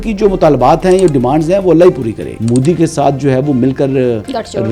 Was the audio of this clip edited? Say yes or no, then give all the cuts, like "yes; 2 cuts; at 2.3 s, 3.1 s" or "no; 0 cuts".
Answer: yes; 1 cut; at 2.3 s